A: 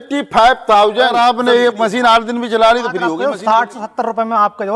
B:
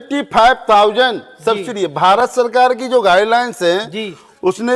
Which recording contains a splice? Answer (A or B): A